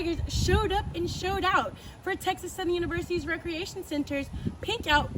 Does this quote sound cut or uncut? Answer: uncut